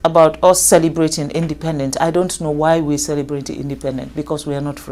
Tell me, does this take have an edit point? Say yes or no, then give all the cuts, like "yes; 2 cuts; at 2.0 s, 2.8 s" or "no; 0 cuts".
no; 0 cuts